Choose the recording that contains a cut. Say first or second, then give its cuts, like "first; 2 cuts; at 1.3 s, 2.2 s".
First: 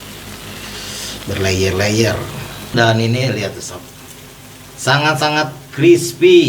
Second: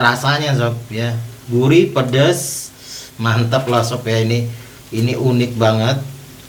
first; 1 cut; at 2.7 s